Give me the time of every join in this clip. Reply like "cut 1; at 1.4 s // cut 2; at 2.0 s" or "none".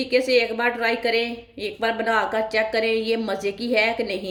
none